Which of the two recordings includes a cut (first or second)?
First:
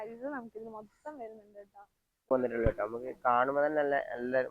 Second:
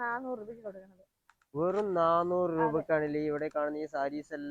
first